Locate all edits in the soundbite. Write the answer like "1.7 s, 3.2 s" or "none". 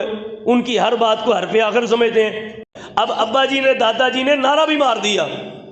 2.6 s